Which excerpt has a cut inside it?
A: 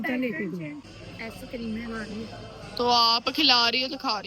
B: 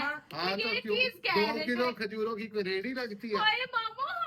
A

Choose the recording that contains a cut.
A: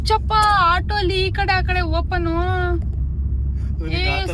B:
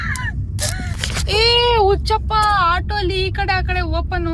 B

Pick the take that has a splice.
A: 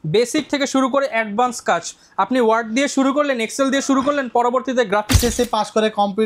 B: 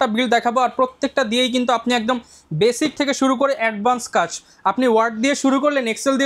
A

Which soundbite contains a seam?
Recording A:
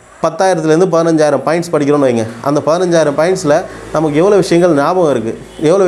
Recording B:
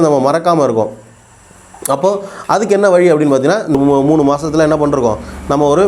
B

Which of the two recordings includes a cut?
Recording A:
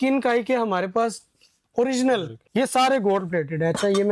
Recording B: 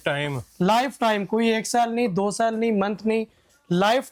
A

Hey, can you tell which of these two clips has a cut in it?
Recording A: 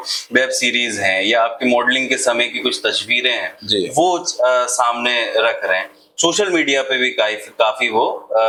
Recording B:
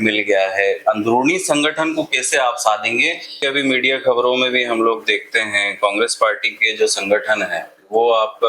B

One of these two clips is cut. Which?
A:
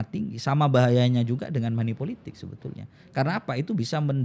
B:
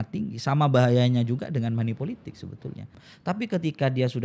B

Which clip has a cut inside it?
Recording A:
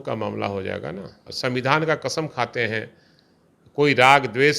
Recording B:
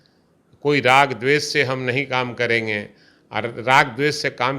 A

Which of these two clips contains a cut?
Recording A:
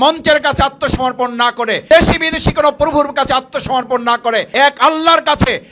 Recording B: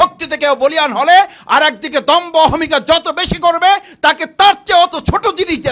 A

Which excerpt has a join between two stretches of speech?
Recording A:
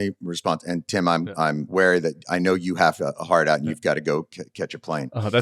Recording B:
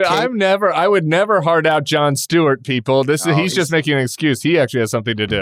A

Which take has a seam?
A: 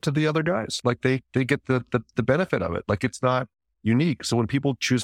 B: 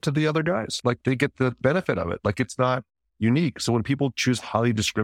B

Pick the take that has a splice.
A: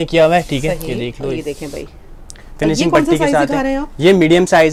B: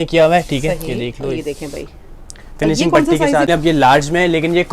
B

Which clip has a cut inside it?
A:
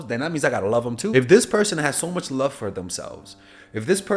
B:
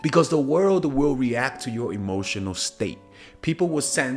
A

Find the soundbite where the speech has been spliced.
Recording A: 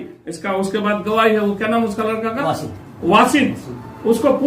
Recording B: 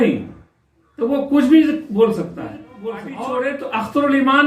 B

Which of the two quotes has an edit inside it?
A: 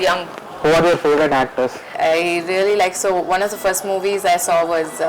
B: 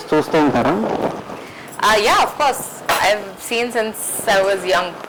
A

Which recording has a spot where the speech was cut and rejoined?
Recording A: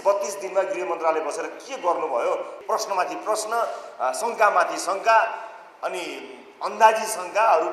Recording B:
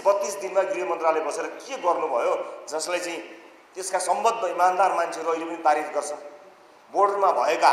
A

